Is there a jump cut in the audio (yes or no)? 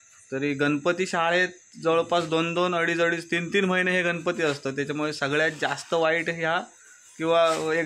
no